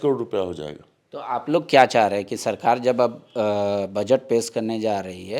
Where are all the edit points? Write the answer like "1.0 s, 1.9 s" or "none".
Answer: none

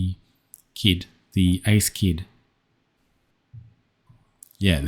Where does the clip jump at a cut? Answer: 3.0 s

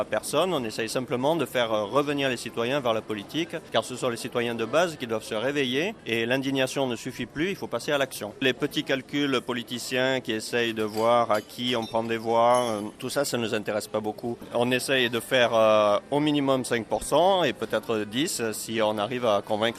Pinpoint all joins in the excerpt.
3.6 s, 6.0 s, 8.4 s, 13.0 s, 14.4 s

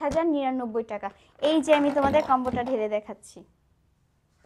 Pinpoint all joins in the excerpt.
none

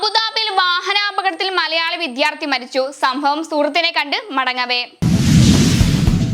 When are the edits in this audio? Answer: 4.9 s

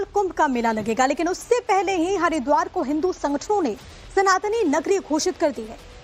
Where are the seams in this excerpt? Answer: 4.4 s

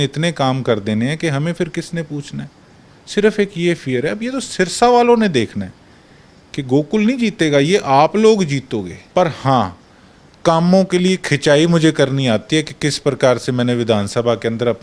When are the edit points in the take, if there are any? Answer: 9.0 s

